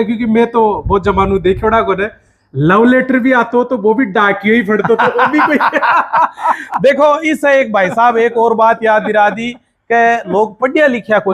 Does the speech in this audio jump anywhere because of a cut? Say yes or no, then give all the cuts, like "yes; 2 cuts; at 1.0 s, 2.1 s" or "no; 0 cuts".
no; 0 cuts